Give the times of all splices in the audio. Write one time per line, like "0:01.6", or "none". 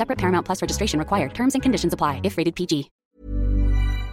0:02.9